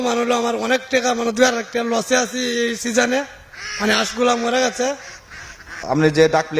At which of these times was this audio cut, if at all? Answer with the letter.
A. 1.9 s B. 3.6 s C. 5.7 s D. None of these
C